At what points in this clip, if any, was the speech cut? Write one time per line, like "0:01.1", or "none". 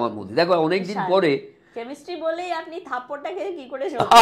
none